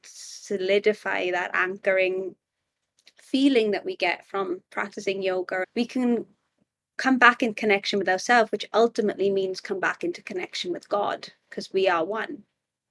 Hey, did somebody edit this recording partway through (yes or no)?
yes